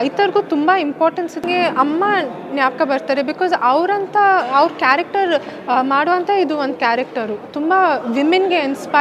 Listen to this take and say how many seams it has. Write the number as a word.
one